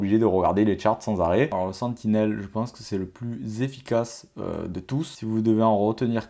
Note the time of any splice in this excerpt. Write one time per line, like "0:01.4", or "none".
0:01.6
0:05.1